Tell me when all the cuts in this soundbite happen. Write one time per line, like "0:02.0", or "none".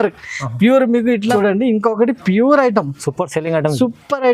0:01.3